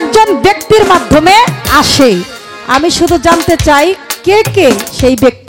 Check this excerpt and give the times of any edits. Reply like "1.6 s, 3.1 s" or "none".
none

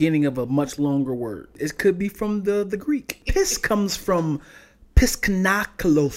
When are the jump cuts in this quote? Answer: 1.5 s, 3.2 s

